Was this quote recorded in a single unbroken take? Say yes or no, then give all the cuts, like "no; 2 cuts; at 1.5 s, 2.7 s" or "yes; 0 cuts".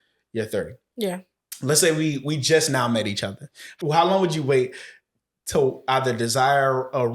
no; 1 cut; at 3.6 s